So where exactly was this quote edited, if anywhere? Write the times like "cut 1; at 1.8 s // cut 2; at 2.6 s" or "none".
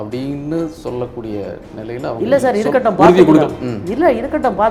none